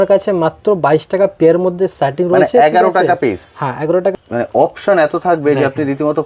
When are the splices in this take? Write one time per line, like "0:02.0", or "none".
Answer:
0:04.1